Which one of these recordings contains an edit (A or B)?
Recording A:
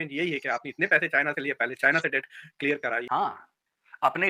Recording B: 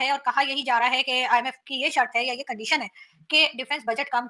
A